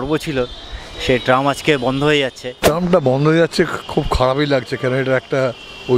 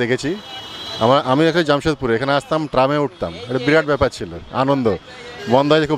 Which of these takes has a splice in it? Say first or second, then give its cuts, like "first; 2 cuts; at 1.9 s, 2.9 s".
first; 1 cut; at 2.5 s